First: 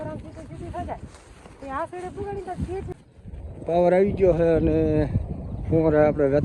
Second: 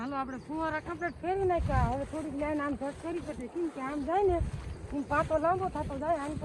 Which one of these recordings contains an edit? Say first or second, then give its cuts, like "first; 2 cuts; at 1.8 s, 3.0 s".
first; 1 cut; at 2.9 s